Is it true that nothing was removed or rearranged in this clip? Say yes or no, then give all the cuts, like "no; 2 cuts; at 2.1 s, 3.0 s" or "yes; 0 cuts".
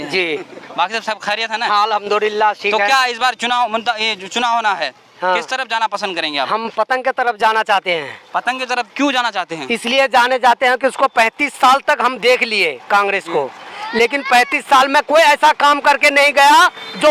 yes; 0 cuts